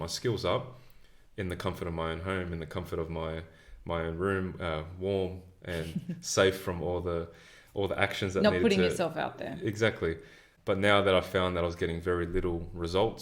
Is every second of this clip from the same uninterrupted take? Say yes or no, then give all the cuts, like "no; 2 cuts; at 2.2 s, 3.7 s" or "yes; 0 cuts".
yes; 0 cuts